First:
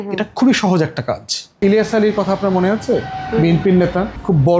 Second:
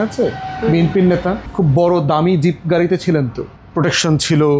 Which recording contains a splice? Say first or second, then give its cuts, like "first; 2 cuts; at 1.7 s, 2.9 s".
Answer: first; 1 cut; at 1.6 s